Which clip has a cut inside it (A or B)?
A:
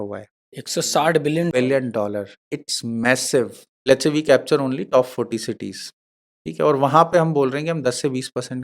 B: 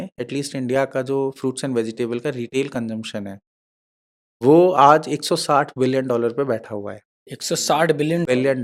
A